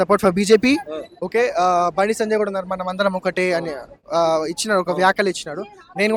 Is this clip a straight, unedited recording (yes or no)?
yes